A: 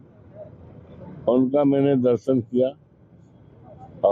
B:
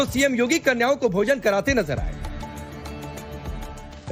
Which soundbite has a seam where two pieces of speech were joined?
A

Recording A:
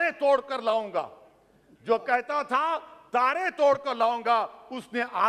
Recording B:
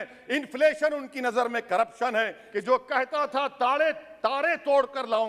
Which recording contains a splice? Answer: B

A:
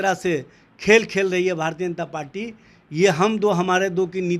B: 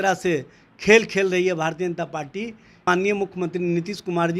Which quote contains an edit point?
B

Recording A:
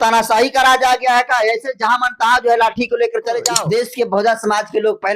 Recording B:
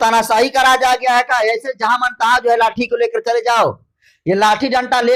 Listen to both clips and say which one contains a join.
A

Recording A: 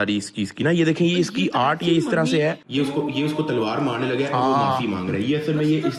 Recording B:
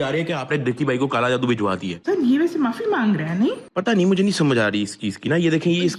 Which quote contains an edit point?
B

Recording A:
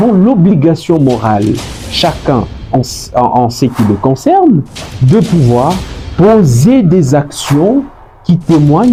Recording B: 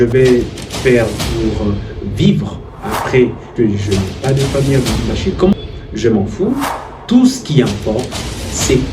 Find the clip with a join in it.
B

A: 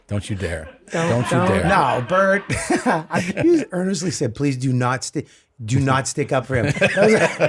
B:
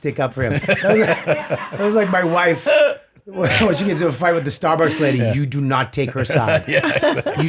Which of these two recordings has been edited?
A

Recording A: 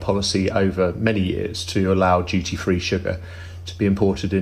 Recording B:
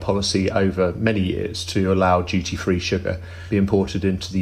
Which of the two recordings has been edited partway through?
B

